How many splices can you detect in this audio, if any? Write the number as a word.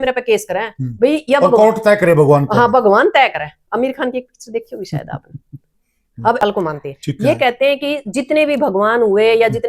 one